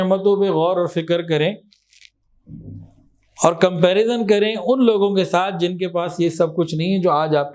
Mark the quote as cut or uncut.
uncut